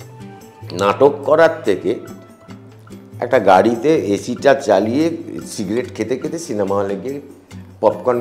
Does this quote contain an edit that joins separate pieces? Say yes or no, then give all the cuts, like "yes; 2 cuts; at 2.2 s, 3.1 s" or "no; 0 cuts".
no; 0 cuts